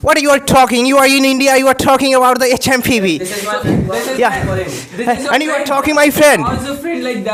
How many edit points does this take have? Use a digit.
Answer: 0